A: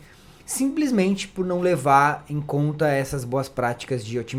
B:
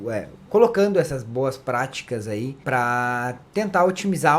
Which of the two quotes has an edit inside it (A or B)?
B